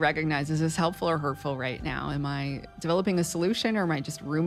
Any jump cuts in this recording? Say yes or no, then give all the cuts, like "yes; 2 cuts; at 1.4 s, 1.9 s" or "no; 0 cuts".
no; 0 cuts